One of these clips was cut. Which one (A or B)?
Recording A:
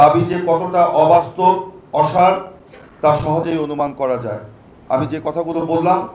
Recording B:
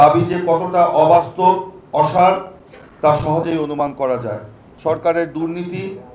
B